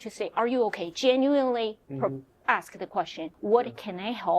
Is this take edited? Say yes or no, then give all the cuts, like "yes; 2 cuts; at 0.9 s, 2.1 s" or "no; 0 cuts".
yes; 1 cut; at 3.3 s